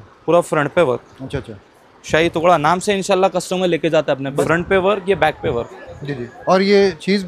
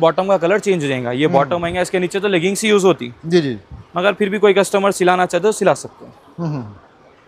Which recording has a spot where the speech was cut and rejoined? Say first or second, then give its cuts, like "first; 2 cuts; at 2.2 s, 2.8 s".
first; 1 cut; at 4.4 s